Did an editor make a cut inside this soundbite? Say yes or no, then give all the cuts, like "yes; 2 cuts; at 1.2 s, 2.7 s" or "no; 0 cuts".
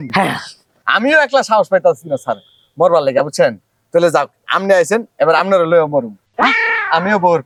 no; 0 cuts